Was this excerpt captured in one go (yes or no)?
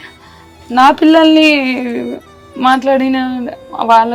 yes